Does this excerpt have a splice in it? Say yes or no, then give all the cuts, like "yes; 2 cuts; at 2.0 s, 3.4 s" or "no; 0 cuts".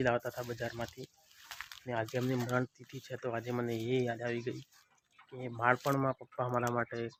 no; 0 cuts